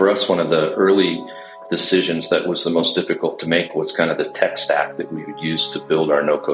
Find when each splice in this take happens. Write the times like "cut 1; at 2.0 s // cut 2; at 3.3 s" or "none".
none